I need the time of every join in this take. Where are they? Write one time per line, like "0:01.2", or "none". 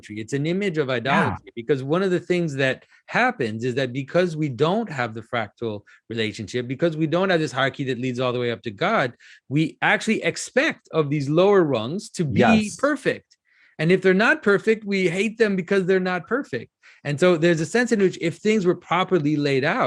none